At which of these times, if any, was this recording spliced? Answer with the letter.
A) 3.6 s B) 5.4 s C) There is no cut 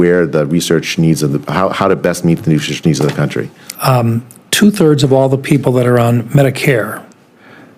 A